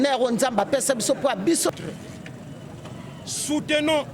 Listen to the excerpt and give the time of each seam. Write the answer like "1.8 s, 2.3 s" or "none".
1.7 s